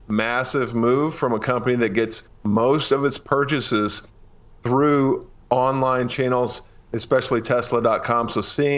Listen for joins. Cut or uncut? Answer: uncut